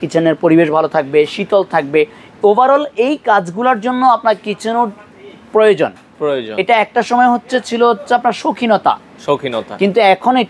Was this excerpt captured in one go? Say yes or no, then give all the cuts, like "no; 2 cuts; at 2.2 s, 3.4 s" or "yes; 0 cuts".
yes; 0 cuts